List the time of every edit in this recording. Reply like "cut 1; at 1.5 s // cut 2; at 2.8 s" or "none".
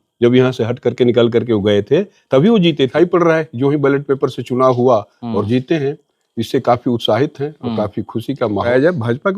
cut 1; at 2.9 s // cut 2; at 8.7 s